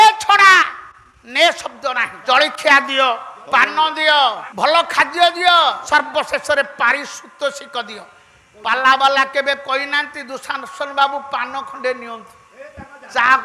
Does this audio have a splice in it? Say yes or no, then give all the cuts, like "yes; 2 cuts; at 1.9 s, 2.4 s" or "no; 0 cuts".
yes; 4 cuts; at 2.1 s, 3.3 s, 4.5 s, 5.8 s